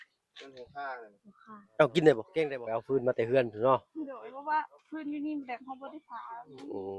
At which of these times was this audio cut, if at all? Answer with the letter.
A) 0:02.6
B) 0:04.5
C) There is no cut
A